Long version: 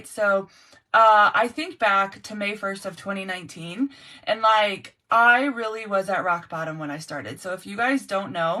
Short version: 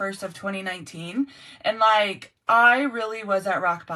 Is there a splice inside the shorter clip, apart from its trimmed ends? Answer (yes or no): no